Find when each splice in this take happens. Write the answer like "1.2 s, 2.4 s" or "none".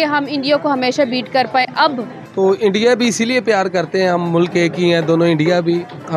2.2 s